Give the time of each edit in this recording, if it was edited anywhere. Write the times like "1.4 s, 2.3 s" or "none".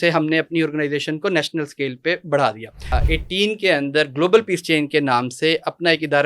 3.0 s